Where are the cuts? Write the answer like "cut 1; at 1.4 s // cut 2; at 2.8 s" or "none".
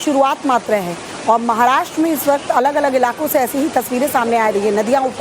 none